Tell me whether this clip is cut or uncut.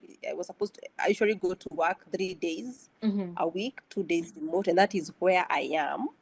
uncut